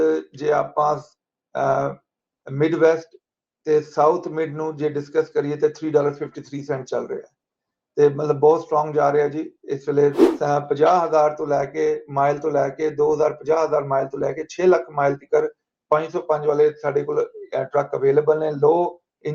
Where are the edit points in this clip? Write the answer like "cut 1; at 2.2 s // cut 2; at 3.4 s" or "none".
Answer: cut 1; at 10.3 s